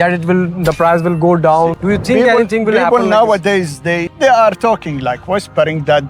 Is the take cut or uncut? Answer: uncut